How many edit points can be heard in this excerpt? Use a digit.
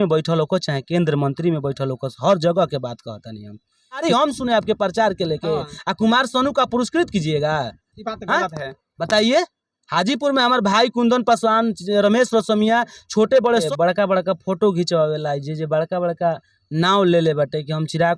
2